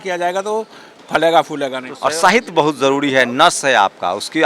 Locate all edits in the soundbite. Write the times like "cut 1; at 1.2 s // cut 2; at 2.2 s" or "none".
cut 1; at 1.8 s